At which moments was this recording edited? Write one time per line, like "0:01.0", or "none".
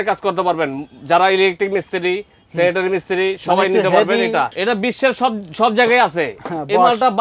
0:04.5